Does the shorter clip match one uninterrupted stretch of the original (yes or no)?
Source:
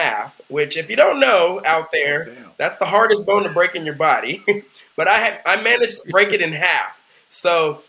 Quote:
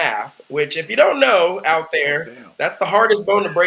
yes